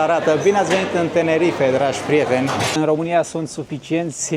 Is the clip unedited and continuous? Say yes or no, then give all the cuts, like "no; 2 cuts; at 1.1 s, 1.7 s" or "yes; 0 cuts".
no; 1 cut; at 2.8 s